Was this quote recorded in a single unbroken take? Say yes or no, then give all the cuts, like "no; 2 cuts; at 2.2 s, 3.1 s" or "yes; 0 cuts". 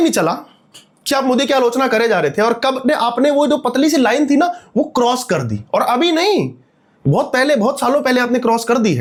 yes; 0 cuts